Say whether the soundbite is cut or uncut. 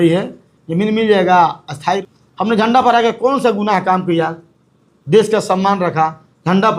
cut